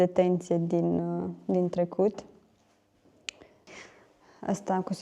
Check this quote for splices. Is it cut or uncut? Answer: cut